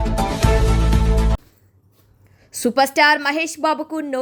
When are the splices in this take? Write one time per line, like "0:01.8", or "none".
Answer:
none